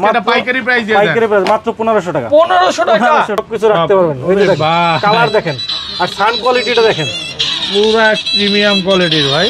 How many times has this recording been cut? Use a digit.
1